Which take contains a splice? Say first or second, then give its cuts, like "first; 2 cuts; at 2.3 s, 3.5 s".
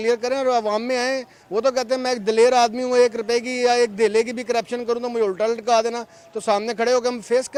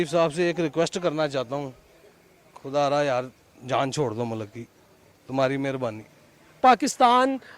second; 1 cut; at 6.4 s